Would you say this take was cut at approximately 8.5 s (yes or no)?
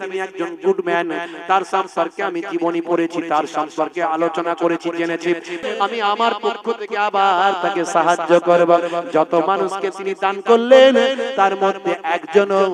no